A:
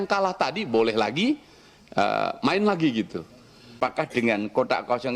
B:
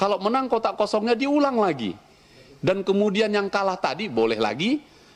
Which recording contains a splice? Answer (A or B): A